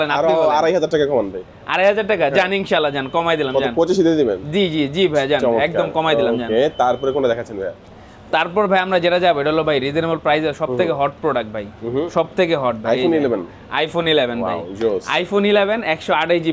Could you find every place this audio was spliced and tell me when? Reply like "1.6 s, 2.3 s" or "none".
none